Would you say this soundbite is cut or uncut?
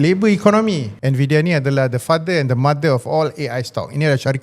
cut